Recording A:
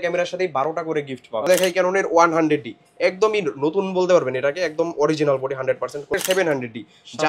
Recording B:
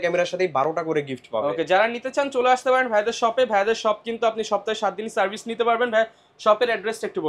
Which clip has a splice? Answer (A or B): A